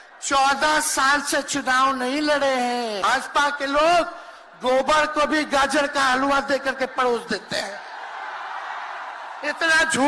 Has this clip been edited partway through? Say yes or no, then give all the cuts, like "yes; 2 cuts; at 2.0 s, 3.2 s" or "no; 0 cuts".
yes; 1 cut; at 3.1 s